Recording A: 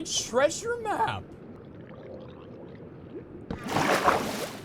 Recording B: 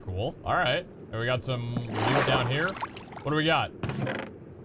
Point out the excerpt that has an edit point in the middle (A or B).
A